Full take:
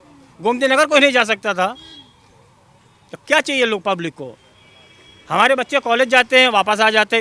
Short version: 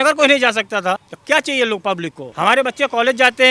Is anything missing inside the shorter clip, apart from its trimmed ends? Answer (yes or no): yes